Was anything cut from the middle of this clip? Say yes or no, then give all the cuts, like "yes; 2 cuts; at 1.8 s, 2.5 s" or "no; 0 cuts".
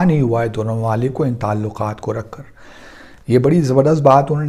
no; 0 cuts